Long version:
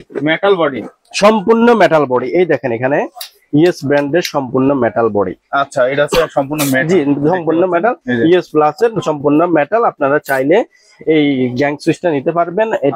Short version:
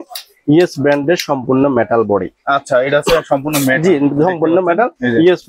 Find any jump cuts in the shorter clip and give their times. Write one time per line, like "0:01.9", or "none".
none